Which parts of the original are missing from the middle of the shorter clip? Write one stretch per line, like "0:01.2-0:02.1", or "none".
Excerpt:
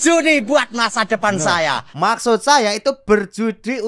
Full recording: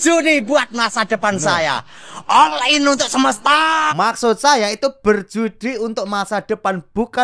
0:01.9-0:03.9